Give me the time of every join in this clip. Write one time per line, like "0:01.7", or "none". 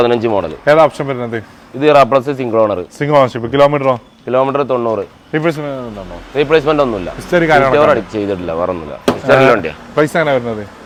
none